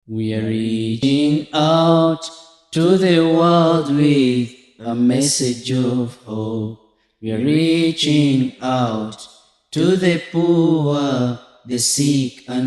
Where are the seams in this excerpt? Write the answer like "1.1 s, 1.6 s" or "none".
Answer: 1.0 s